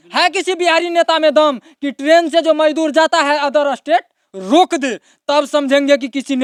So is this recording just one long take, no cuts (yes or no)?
yes